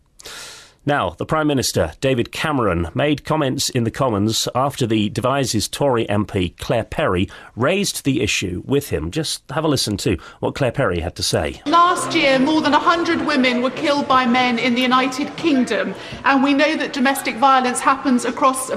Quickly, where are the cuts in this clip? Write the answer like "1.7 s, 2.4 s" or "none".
9.6 s

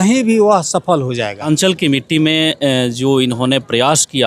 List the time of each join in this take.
1.5 s

